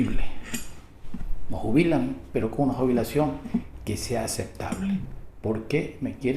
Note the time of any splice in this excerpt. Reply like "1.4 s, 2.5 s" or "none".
4.9 s